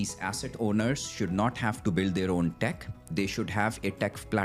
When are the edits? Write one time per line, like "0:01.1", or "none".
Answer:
none